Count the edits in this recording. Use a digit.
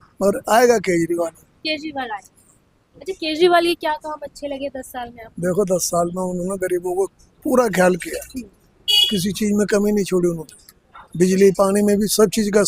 0